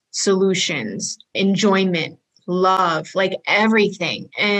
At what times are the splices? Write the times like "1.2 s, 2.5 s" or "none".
1.3 s, 2.8 s